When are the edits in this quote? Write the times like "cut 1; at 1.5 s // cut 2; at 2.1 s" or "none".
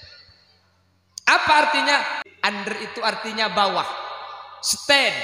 cut 1; at 2.2 s